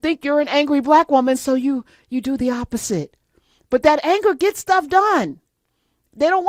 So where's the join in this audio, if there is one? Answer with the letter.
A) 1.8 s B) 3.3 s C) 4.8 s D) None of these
D